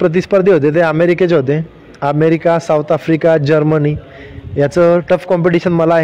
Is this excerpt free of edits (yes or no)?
yes